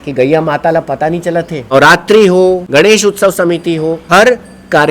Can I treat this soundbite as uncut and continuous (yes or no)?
no